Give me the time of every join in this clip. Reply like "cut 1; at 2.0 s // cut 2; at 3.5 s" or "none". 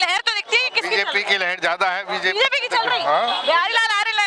none